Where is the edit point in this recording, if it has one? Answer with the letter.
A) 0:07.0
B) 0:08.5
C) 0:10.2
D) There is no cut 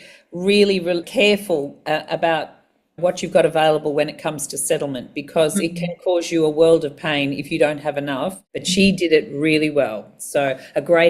B